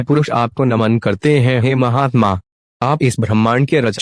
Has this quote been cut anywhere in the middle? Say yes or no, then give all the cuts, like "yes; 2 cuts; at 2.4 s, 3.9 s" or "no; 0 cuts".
no; 0 cuts